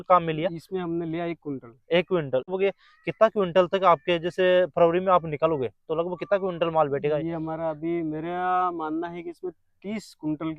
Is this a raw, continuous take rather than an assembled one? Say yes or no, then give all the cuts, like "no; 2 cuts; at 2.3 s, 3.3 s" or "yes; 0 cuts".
no; 1 cut; at 2.5 s